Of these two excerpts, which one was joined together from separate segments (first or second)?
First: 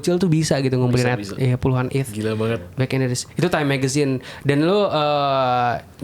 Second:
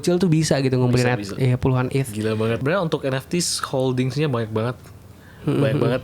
second